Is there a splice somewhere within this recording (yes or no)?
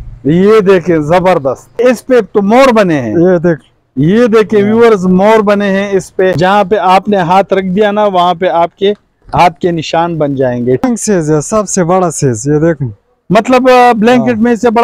yes